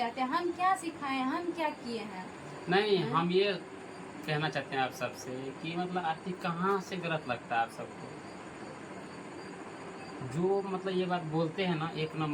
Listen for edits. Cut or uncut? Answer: uncut